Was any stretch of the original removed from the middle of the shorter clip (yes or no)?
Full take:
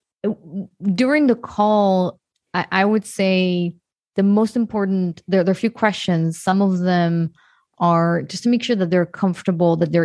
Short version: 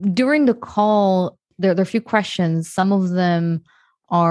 yes